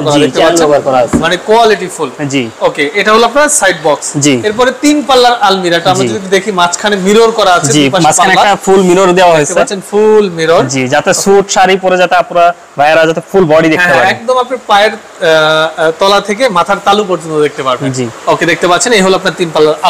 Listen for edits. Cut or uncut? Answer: uncut